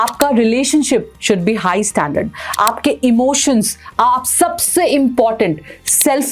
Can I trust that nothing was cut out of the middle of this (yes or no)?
yes